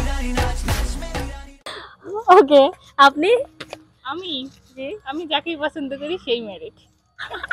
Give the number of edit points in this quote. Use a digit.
0